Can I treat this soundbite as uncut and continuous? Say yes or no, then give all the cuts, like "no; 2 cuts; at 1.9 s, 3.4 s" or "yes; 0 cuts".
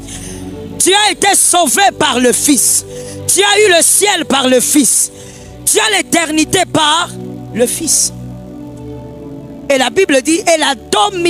yes; 0 cuts